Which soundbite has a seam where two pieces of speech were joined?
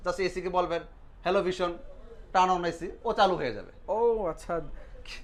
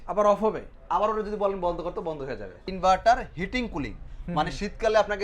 second; 1 cut; at 2.6 s

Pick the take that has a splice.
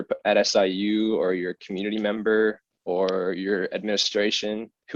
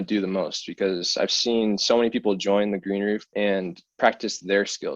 second; 1 cut; at 3.3 s

